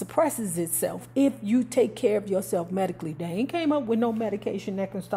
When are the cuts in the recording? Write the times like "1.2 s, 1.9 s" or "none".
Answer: none